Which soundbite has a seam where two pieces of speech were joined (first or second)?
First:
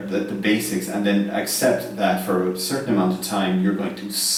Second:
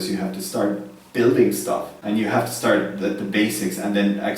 second